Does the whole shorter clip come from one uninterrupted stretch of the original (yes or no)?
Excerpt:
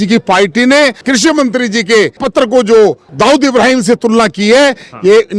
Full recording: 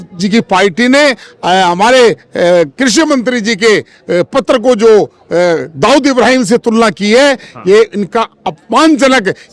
no